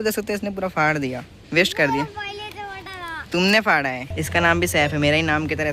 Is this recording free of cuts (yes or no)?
no